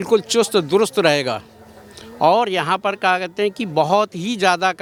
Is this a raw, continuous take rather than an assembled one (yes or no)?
yes